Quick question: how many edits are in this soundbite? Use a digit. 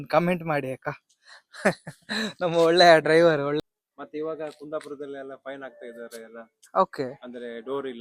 1